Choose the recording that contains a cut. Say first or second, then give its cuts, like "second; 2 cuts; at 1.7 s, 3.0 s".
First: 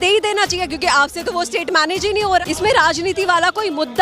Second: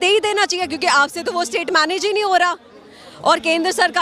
first; 1 cut; at 2.4 s